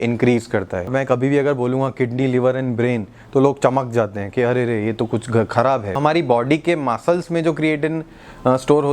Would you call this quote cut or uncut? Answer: cut